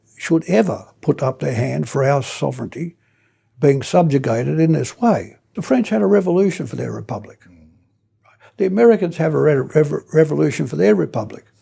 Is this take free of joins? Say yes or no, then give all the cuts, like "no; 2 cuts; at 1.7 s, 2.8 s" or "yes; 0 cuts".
no; 1 cut; at 5.5 s